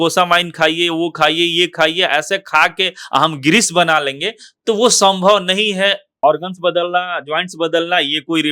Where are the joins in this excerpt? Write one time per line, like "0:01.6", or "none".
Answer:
0:06.2